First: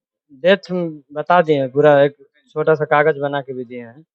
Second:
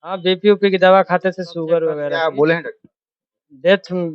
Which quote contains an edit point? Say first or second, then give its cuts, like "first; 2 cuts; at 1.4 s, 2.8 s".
second; 1 cut; at 2.0 s